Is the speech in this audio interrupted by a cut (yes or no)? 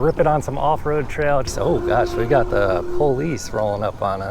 yes